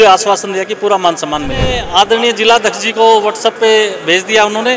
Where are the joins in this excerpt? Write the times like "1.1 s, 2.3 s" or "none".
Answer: 1.8 s